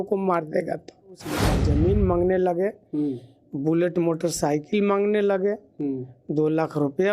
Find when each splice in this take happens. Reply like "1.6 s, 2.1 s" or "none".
1.6 s